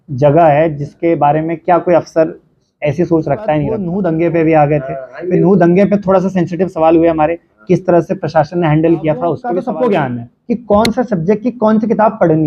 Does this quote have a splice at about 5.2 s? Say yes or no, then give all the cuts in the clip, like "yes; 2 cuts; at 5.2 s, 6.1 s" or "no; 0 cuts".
no; 2 cuts; at 3.9 s, 9.5 s